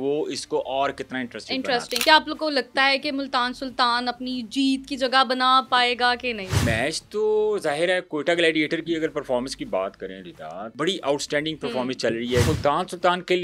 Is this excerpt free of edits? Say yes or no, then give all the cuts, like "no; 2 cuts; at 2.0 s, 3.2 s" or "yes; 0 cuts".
no; 4 cuts; at 1.9 s, 6.6 s, 10.7 s, 12.5 s